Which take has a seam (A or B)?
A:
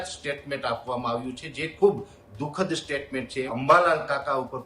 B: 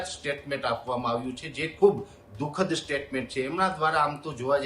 A